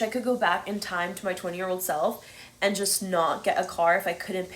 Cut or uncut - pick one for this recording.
uncut